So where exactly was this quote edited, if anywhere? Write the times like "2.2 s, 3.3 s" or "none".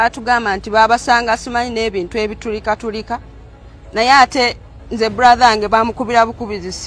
2.4 s